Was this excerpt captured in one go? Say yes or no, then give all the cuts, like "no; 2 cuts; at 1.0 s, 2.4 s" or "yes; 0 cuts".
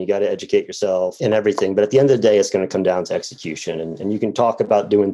no; 1 cut; at 1.1 s